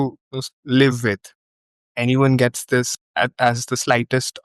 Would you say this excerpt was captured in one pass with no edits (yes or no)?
no